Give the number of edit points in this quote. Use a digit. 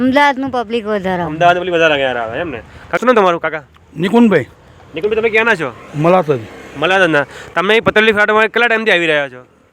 1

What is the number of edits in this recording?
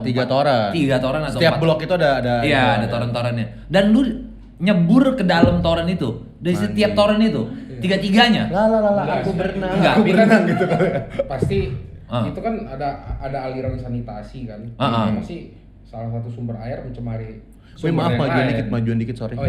0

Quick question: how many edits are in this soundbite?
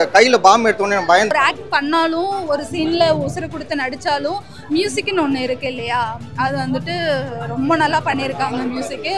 1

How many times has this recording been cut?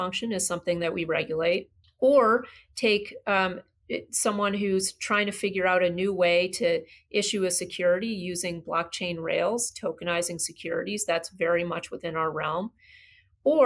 1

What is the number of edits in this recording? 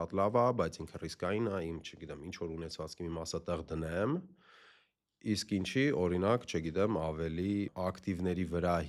1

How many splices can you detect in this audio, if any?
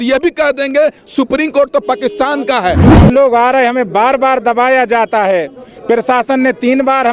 1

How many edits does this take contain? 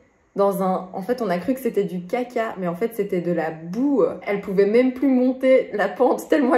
1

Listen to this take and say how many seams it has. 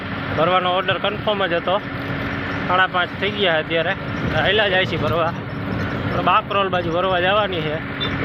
0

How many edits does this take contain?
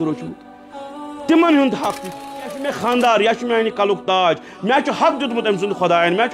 1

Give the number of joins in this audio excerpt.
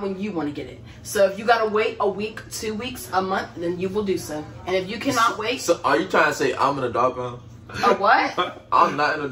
0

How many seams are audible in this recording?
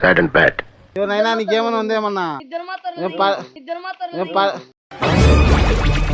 1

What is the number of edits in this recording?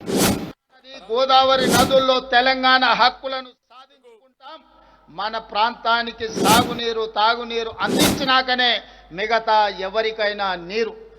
1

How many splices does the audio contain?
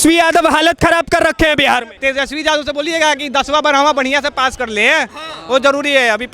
1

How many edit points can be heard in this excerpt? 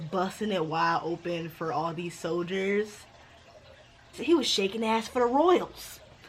1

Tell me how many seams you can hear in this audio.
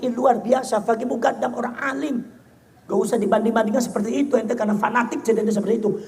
0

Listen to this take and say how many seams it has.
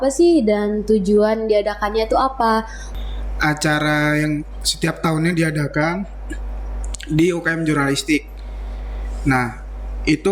1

